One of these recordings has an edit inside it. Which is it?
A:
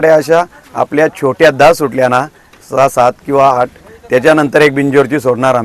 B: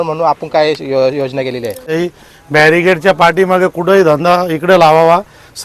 B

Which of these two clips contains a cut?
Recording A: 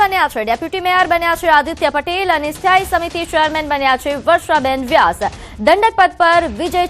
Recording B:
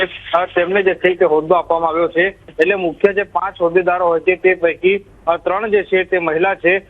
A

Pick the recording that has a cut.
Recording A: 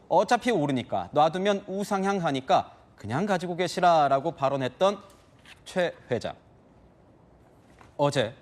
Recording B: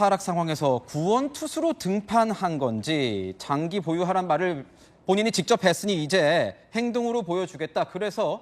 B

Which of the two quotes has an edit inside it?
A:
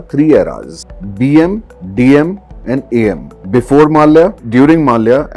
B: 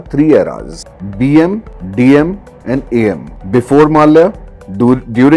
A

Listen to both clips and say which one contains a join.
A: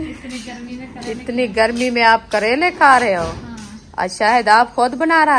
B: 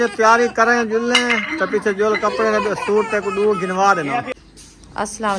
B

